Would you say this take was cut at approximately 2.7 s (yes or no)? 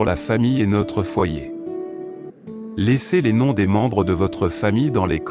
yes